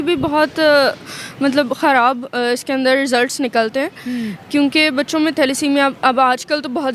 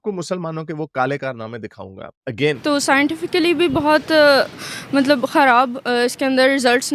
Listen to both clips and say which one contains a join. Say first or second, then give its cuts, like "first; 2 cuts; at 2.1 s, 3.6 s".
second; 1 cut; at 2.6 s